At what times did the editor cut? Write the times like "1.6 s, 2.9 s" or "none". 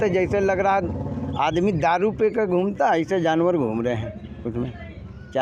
none